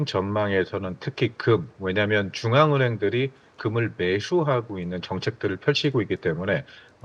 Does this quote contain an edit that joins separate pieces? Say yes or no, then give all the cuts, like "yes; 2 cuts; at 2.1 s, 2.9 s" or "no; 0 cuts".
no; 0 cuts